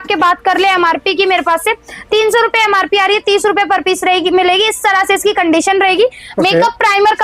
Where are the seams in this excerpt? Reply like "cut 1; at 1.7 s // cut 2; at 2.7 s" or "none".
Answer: none